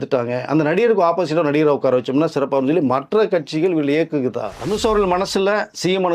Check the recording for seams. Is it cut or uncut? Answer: cut